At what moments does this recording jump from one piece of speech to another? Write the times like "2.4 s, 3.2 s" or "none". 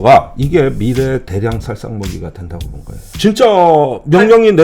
3.1 s

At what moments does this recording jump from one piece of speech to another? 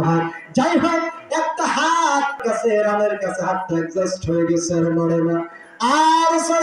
2.4 s

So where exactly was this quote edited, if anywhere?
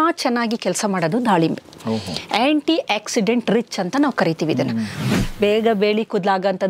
5.1 s

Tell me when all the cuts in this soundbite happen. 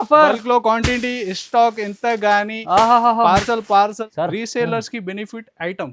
4.0 s

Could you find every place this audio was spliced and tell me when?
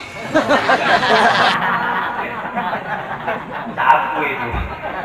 1.6 s

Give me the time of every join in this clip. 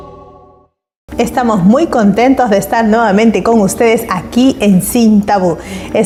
none

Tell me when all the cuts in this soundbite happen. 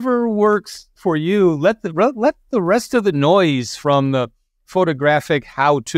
none

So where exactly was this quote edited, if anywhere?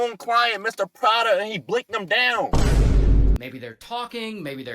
3.4 s

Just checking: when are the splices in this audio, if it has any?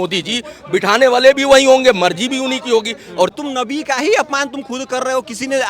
3.3 s

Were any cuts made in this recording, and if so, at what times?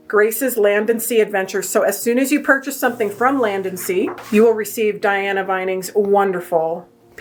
none

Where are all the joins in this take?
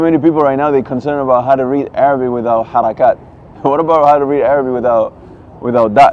none

